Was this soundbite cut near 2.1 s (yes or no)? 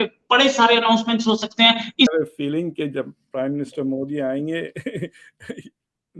yes